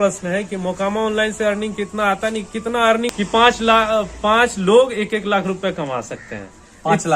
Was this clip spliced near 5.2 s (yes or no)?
no